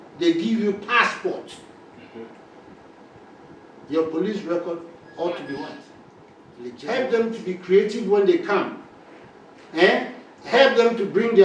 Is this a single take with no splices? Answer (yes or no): no